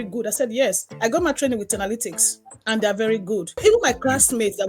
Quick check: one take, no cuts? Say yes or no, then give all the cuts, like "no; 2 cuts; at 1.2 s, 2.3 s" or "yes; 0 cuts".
no; 1 cut; at 3.5 s